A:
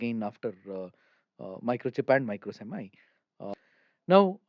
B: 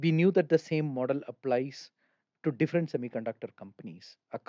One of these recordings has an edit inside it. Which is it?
A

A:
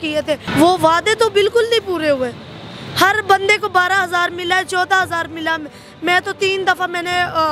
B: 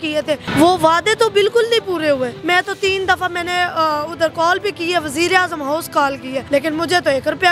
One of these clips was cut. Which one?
B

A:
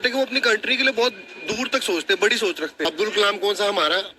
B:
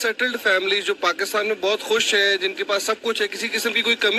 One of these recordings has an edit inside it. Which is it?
A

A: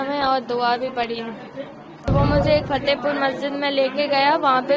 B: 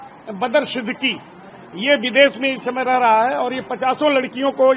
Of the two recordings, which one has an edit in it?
A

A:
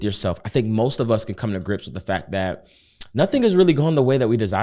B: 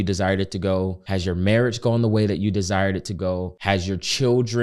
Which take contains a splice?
B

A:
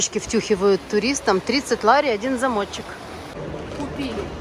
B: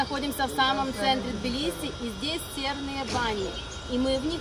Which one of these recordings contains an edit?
A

